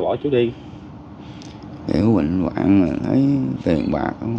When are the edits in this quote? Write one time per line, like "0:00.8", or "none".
none